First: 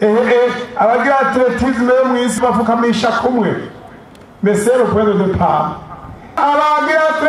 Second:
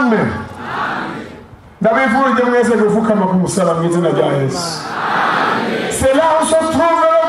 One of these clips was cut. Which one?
first; 2 cuts; at 2.4 s, 6.4 s

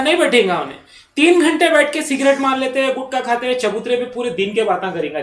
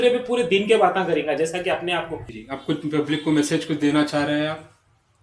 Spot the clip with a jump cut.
second; 1 cut; at 2.4 s

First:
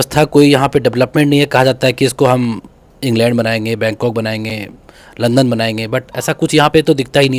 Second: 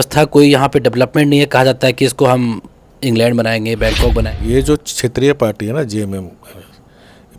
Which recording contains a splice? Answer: second; 1 cut; at 4.3 s

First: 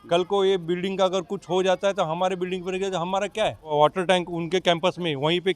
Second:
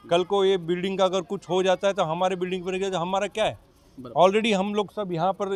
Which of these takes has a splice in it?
first; 1 cut; at 3.7 s

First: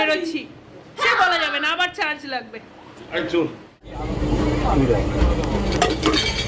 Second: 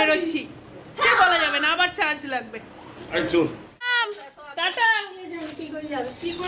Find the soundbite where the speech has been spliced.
first; 1 cut; at 3.8 s

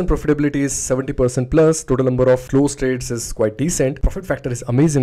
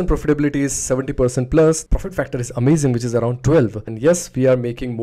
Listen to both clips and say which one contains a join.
second; 2 cuts; at 1.8 s, 3.8 s

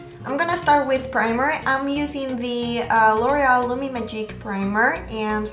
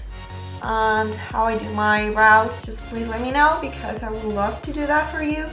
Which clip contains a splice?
second; 1 cut; at 3.5 s

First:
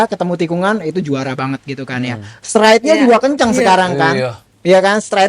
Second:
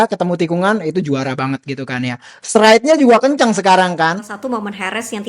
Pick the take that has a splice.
second; 1 cut; at 4.1 s

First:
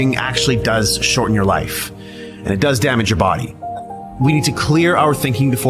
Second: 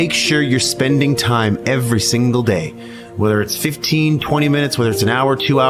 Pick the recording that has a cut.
first; 1 cut; at 3.6 s

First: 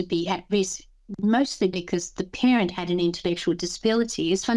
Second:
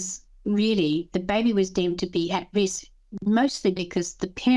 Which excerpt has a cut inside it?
second; 1 cut; at 1.1 s

